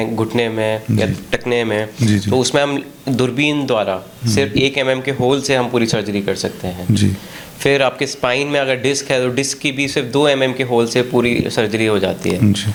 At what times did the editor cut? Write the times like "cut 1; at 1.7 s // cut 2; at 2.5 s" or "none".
none